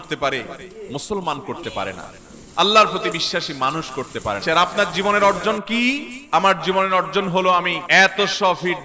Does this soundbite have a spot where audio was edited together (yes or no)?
yes